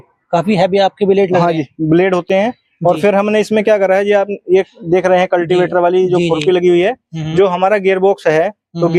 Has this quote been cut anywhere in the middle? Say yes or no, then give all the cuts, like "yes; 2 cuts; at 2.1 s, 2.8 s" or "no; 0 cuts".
no; 0 cuts